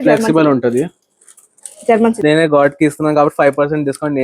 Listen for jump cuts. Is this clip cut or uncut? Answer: cut